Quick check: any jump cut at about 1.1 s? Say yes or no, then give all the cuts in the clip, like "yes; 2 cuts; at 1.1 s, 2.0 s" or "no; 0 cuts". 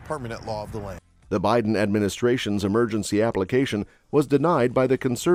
no; 0 cuts